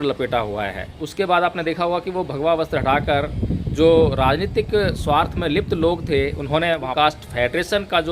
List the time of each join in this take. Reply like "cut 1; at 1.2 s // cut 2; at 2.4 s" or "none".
cut 1; at 1.0 s // cut 2; at 6.9 s